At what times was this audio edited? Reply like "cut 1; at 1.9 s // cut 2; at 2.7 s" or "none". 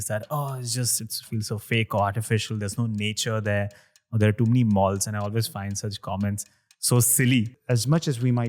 cut 1; at 7.6 s